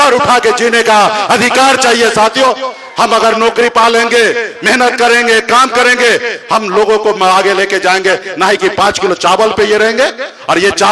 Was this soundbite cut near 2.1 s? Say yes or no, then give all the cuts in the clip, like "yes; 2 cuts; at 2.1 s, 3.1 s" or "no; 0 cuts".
no; 0 cuts